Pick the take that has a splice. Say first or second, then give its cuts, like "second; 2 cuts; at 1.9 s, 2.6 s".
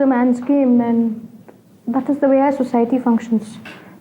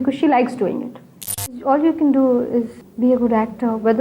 second; 2 cuts; at 1.4 s, 2.8 s